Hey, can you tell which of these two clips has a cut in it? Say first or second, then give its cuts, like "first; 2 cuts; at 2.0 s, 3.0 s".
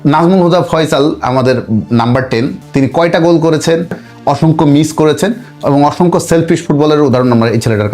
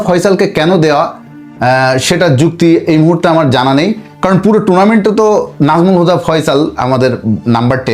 first; 1 cut; at 4.0 s